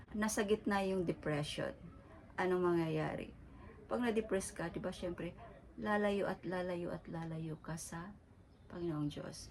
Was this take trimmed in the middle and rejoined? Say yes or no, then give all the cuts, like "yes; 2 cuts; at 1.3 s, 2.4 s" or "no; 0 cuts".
no; 0 cuts